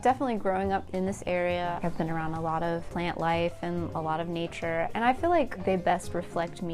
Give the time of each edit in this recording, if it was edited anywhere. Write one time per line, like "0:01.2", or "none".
0:00.9
0:01.8
0:02.9